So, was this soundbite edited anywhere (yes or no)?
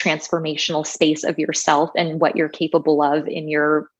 no